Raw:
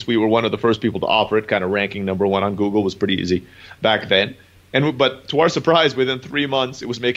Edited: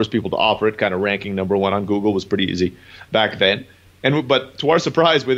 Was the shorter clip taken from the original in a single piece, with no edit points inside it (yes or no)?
yes